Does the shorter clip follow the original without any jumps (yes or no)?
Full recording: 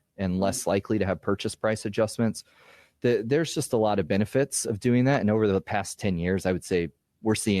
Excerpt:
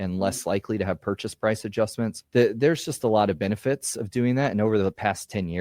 no